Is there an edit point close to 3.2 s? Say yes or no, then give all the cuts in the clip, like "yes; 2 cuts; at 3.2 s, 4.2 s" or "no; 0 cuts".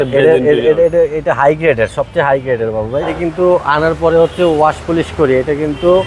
yes; 1 cut; at 3.2 s